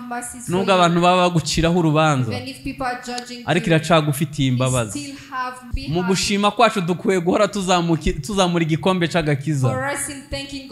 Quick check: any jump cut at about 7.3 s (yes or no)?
no